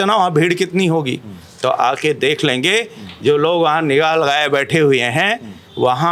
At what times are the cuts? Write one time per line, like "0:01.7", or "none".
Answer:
none